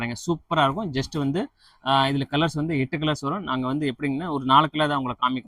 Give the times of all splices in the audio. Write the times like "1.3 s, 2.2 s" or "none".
none